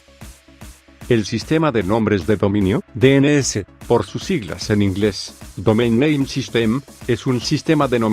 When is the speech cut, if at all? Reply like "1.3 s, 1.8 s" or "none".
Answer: 1.0 s